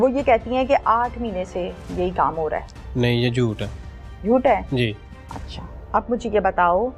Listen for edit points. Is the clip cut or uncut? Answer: uncut